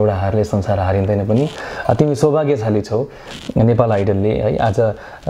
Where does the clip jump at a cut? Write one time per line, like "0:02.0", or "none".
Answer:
none